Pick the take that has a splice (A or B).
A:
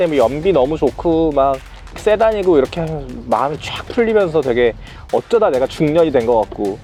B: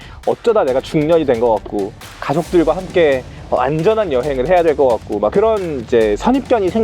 B